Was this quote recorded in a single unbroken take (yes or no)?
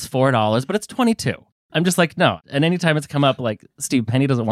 no